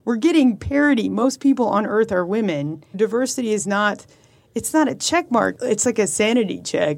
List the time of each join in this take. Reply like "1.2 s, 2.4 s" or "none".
1.2 s, 2.9 s, 5.5 s